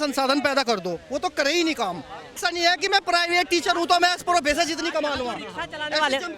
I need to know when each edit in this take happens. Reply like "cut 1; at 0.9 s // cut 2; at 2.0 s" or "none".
cut 1; at 2.4 s